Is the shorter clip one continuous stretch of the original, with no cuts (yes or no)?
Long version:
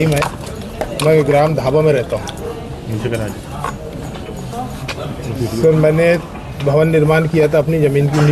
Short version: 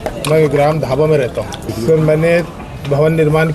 no